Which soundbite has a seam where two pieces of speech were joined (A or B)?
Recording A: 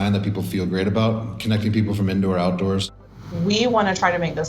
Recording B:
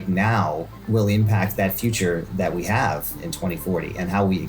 A